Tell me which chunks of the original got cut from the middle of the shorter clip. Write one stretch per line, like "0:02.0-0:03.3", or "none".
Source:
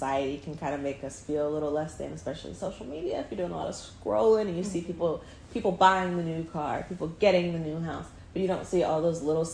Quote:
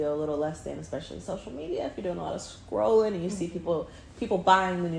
none